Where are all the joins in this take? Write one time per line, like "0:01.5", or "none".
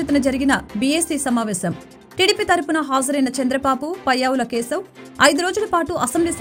none